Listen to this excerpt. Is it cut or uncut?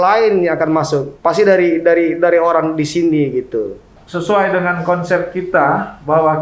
cut